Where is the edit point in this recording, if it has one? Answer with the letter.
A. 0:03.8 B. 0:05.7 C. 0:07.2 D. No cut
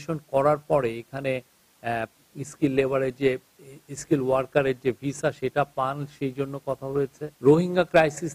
C